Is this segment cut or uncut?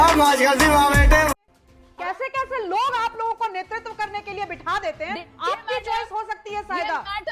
cut